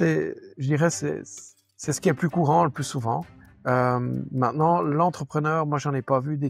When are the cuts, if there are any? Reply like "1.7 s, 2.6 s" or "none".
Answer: none